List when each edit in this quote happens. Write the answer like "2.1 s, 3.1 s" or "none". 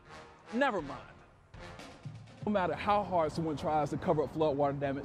2.5 s